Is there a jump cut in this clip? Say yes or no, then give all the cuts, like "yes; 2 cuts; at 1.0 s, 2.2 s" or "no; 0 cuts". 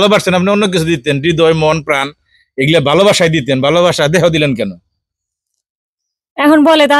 no; 0 cuts